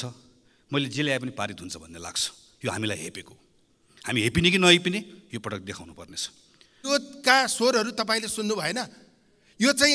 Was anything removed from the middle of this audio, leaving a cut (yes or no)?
yes